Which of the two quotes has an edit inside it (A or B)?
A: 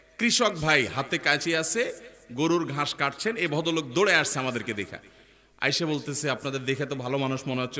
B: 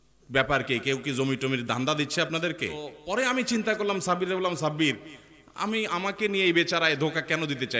B